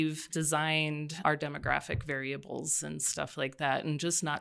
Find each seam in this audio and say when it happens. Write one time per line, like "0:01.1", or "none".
0:01.1